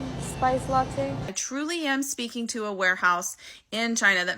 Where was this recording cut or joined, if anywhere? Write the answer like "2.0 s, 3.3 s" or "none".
1.3 s